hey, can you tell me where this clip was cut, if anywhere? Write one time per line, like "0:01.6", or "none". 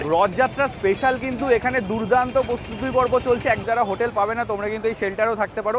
0:03.6